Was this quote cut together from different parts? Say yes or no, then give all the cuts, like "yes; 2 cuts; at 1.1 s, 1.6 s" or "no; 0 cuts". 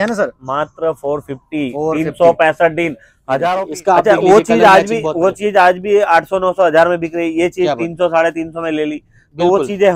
yes; 1 cut; at 3.4 s